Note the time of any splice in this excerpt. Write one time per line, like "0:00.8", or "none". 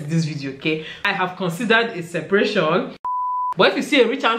0:01.0
0:03.2

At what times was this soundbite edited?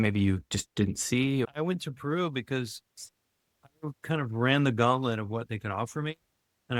0:01.4

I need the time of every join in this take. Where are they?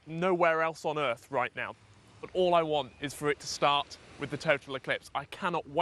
0:01.9

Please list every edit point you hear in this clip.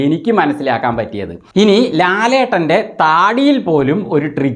0:01.4

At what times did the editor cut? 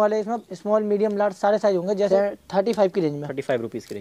0:02.1

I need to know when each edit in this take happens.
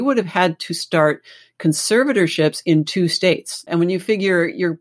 0:03.7

